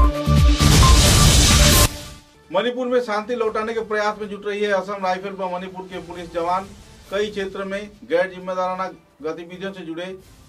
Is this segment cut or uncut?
uncut